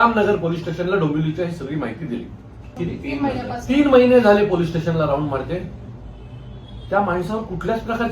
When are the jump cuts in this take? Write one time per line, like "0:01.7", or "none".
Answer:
0:02.6